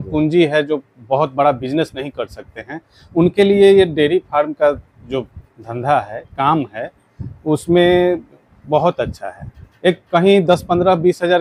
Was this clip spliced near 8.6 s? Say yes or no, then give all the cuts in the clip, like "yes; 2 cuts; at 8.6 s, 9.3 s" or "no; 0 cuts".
no; 0 cuts